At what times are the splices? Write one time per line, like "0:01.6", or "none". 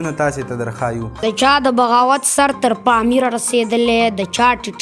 0:01.1

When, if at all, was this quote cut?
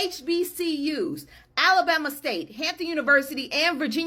none

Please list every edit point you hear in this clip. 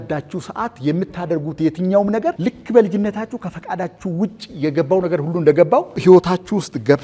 0:02.4
0:06.0

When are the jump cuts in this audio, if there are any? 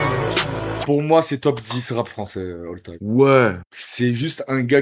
0:00.8
0:01.4

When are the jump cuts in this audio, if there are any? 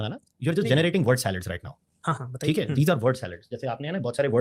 none

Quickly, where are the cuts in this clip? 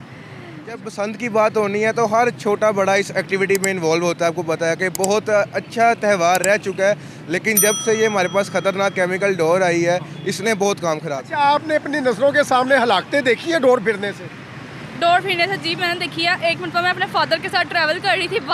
0:00.9
0:11.2

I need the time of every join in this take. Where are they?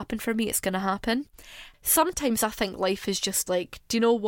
0:01.4

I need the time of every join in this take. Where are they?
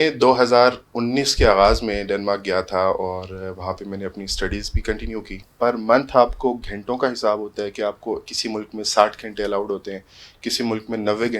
0:05.4

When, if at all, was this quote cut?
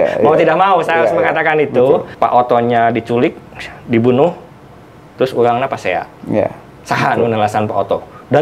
0:02.1

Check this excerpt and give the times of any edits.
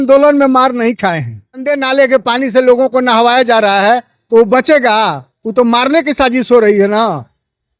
0:01.6

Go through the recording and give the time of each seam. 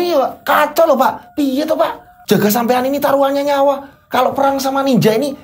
0:02.1

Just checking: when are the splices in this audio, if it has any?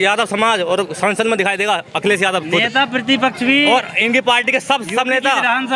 none

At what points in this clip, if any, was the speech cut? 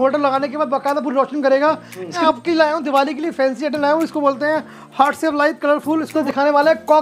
0:02.2
0:06.2

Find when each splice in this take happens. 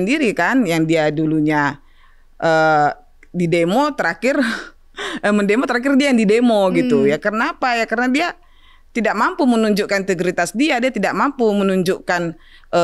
none

